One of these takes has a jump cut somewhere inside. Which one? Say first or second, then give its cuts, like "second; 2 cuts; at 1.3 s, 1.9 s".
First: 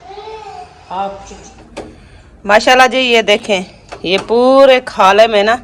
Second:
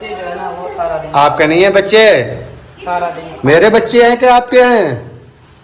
first; 1 cut; at 1.6 s